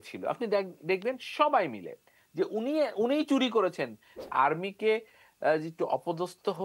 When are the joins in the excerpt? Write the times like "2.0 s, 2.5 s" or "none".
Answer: 4.3 s